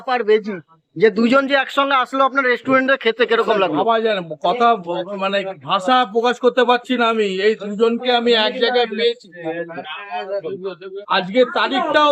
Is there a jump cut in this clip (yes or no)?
no